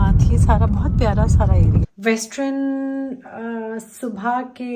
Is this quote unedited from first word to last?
no; 1 cut; at 1.9 s

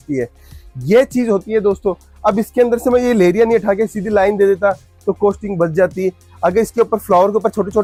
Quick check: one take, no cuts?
yes; 0 cuts

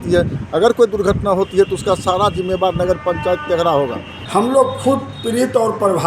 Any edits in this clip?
yes; 1 cut; at 4.2 s

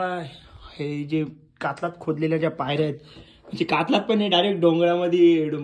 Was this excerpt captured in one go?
yes; 0 cuts

